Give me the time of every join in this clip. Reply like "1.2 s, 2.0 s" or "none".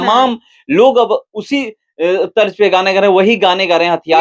none